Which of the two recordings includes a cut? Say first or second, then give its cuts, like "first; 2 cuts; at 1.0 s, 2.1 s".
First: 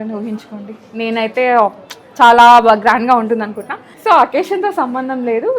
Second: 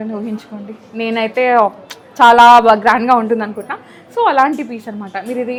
first; 1 cut; at 3.9 s